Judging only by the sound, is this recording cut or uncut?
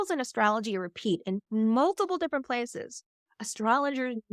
uncut